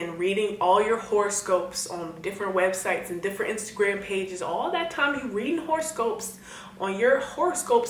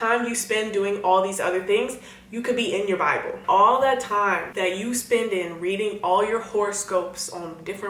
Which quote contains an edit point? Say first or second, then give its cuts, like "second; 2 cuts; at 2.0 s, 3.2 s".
second; 2 cuts; at 3.4 s, 4.5 s